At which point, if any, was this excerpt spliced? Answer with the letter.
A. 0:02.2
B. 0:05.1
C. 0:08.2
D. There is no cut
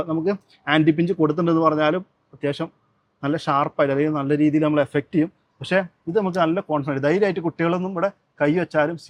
D